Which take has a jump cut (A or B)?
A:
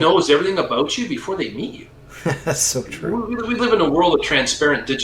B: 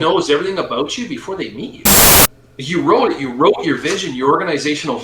B